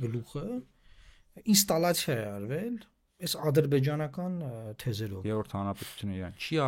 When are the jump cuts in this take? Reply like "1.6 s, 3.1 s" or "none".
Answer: 5.1 s